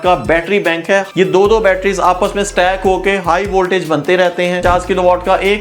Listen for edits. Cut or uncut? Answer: cut